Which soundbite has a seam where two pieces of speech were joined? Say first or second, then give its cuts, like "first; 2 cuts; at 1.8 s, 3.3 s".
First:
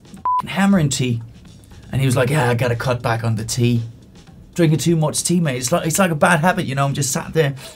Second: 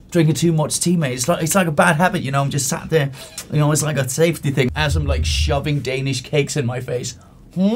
second; 1 cut; at 4.7 s